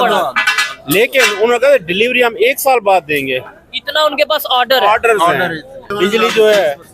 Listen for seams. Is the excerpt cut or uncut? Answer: cut